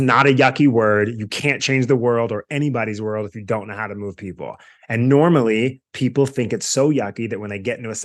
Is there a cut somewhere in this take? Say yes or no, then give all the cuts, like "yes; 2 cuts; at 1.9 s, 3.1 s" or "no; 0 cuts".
no; 0 cuts